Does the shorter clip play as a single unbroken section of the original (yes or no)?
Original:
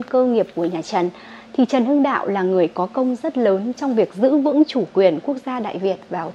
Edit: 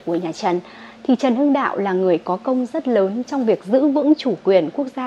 yes